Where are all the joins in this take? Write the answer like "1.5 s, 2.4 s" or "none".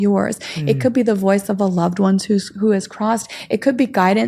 none